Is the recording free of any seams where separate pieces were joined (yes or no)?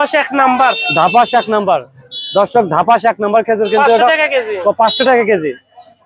yes